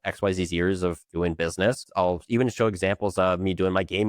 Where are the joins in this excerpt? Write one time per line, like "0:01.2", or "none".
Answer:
0:01.8

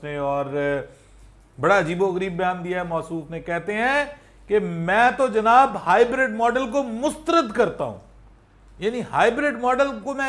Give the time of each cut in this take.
none

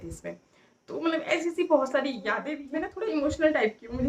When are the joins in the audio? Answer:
0:02.5

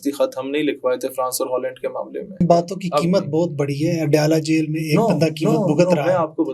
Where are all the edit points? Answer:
0:02.4

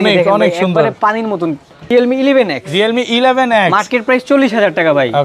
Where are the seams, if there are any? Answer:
0:01.9

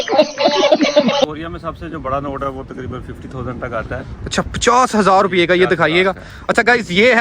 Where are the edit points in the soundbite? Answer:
0:01.2

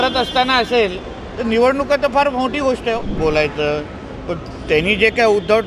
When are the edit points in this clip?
0:03.2

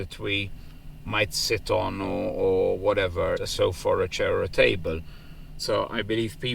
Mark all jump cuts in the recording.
0:03.5
0:05.5

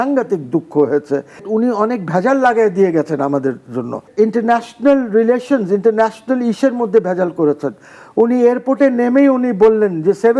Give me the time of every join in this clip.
0:01.5
0:04.1

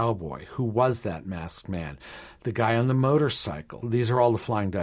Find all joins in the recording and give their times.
0:03.7

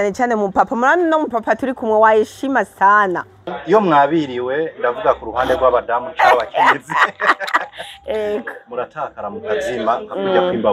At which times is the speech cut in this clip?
0:03.5

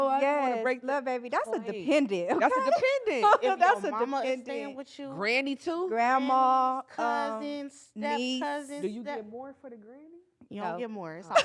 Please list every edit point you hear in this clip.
none

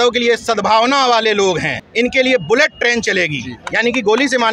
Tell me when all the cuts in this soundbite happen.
0:01.8

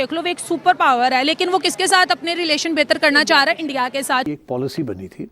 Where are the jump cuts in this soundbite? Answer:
0:04.2

